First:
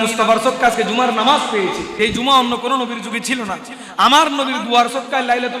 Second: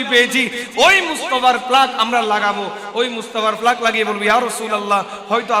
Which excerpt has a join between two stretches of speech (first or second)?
first